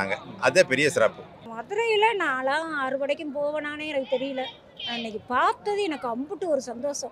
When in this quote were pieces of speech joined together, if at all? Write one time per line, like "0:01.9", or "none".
0:01.3